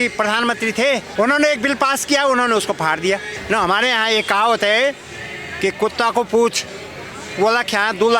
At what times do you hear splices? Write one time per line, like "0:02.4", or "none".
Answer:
0:01.1
0:03.3